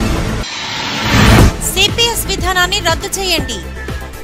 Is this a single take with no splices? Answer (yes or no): no